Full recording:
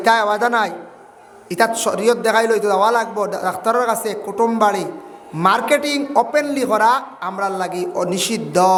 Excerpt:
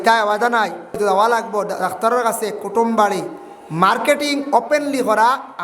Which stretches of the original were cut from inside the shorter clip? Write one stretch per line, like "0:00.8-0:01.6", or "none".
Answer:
0:01.0-0:02.6